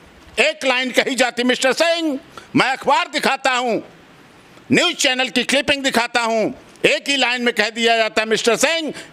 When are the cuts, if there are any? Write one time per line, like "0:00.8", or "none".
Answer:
none